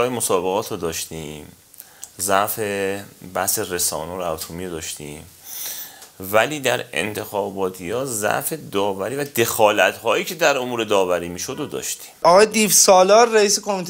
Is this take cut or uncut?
cut